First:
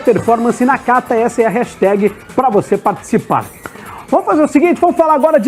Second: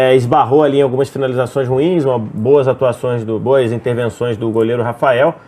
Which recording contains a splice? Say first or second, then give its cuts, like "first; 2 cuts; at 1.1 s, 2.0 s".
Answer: second; 1 cut; at 3.7 s